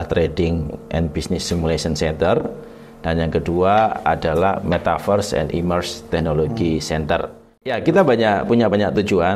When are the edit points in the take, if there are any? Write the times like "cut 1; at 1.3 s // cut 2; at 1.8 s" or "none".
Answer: cut 1; at 7.8 s

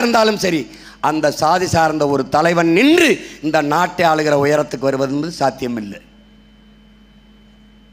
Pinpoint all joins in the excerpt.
none

